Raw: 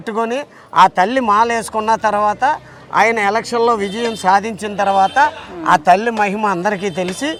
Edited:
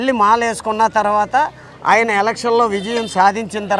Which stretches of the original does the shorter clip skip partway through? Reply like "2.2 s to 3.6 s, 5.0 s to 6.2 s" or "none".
none